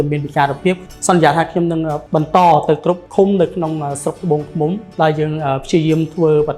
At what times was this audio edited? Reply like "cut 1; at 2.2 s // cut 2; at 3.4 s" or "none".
cut 1; at 0.8 s // cut 2; at 2.0 s // cut 3; at 3.0 s // cut 4; at 4.9 s

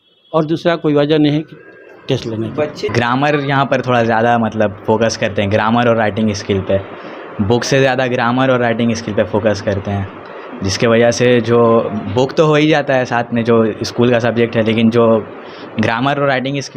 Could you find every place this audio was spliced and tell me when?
cut 1; at 2.9 s

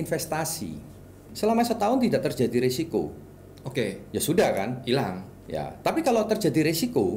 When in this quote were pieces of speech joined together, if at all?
cut 1; at 1.3 s

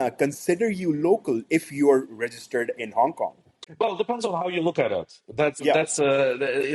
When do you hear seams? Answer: cut 1; at 3.6 s

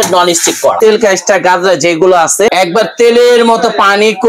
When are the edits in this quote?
cut 1; at 0.8 s // cut 2; at 2.5 s

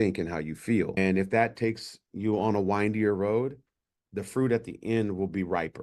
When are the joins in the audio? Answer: cut 1; at 1.0 s

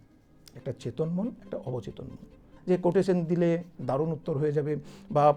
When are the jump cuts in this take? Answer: cut 1; at 2.5 s

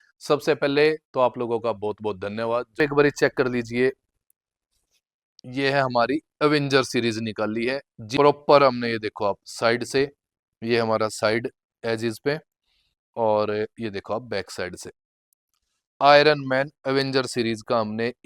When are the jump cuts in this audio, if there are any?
cut 1; at 2.8 s // cut 2; at 8.0 s

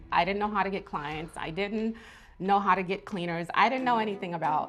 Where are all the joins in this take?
none

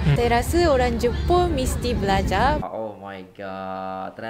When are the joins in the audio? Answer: cut 1; at 2.6 s

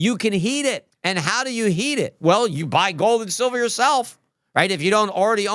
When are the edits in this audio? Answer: cut 1; at 0.9 s

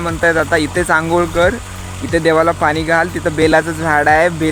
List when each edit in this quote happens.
none

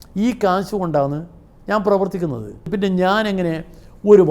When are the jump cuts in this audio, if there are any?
cut 1; at 2.7 s

